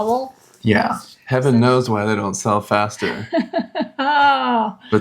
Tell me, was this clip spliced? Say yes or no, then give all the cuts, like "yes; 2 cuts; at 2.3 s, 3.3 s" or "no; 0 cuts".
yes; 1 cut; at 1.1 s